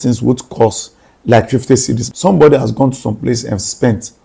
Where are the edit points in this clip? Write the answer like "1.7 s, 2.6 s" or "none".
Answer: 2.0 s

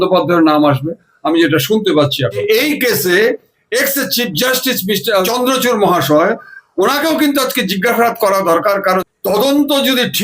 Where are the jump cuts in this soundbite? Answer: 2.4 s, 5.2 s, 9.0 s

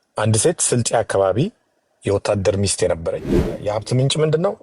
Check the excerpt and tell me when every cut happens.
3.6 s

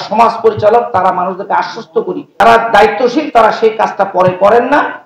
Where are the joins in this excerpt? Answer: 2.4 s

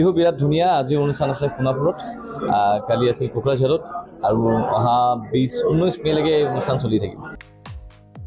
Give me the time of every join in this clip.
7.3 s

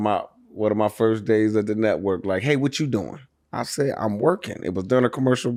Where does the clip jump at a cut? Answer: none

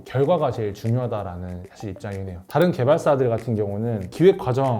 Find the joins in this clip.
2.3 s

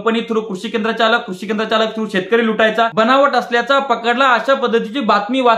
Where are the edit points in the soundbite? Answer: 2.9 s

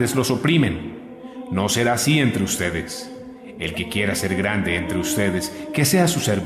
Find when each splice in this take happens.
2.9 s

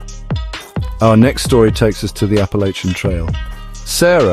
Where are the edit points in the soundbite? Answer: 0.9 s

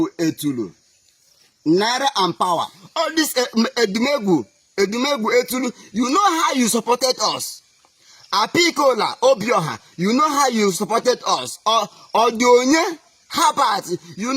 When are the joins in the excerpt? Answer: 2.8 s

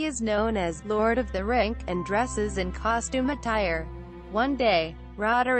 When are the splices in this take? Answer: 2.9 s

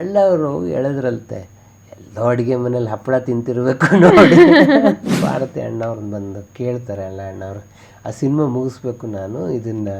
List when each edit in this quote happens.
5.1 s

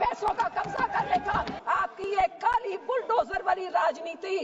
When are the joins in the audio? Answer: 1.5 s

